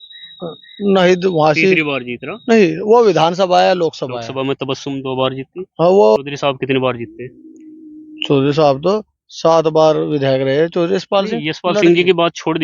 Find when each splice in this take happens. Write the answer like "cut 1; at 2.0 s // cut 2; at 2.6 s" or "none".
cut 1; at 6.2 s